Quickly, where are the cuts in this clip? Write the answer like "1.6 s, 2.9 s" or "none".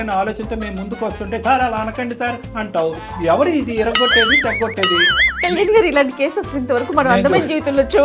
none